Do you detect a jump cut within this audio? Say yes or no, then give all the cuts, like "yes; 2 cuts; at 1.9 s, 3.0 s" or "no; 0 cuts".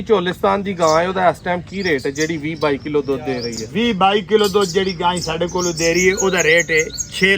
no; 0 cuts